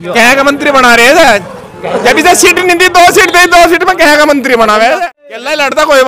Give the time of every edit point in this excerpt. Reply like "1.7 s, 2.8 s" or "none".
5.0 s